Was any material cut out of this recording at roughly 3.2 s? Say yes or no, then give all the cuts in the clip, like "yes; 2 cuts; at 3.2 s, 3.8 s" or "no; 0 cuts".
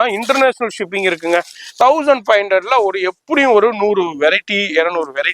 no; 1 cut; at 1.6 s